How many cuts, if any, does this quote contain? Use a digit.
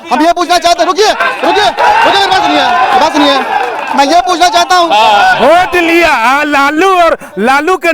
1